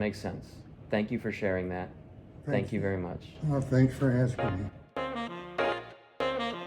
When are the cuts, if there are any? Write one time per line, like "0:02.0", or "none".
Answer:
0:04.9